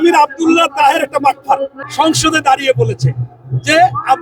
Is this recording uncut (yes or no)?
no